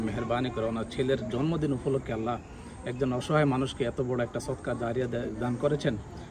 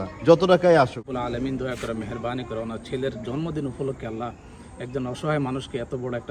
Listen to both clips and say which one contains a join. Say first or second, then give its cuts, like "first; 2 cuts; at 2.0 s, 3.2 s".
second; 1 cut; at 1.0 s